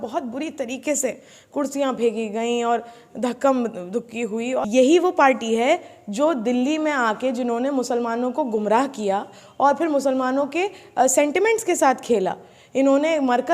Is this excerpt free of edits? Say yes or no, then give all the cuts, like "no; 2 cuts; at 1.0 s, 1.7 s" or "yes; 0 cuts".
no; 1 cut; at 4.7 s